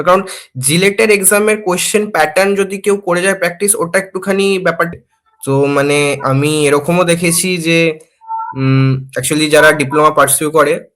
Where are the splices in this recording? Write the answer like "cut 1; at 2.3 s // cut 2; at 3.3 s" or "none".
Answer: cut 1; at 4.9 s